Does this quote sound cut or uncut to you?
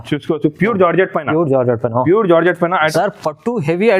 cut